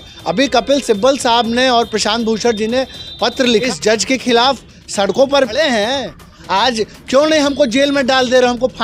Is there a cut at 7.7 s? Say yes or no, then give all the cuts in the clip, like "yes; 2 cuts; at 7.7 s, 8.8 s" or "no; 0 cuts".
no; 2 cuts; at 3.6 s, 5.6 s